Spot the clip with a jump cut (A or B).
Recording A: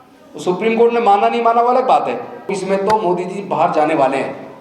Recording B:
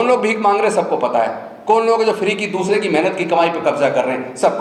A